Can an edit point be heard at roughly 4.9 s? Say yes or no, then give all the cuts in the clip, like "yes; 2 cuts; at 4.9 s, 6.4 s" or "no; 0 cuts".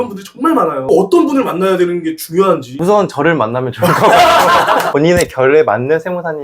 yes; 1 cut; at 4.9 s